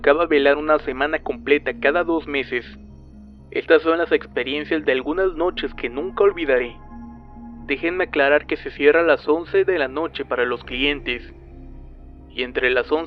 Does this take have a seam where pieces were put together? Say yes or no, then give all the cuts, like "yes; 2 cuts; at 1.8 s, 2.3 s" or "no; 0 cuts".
no; 0 cuts